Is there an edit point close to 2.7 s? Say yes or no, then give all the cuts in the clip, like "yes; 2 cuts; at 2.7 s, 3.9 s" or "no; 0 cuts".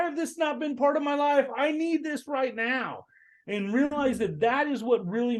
no; 0 cuts